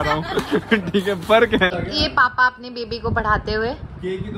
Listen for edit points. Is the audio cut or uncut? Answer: cut